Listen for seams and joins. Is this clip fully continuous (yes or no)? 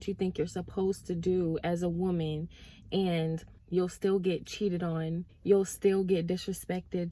no